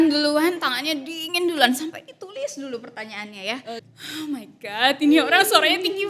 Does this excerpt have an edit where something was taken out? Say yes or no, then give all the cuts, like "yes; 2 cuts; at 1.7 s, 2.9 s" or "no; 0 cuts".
yes; 1 cut; at 3.9 s